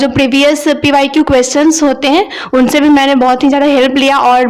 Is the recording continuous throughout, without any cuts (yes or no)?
yes